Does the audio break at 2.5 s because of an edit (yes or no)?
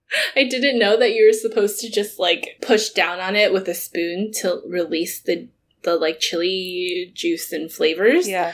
yes